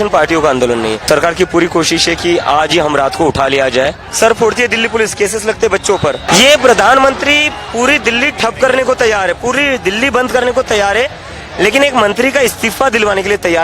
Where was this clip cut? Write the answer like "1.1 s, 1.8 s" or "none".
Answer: 1.1 s, 4.0 s, 6.3 s